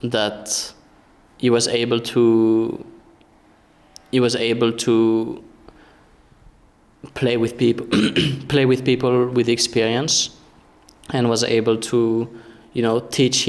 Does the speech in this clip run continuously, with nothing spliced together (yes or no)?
yes